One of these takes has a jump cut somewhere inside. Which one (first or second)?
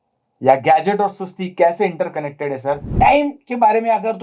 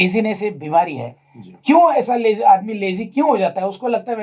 first